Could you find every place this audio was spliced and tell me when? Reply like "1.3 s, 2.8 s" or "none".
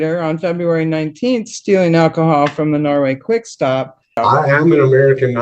4.2 s